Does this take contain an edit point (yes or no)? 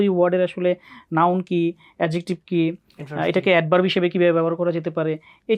no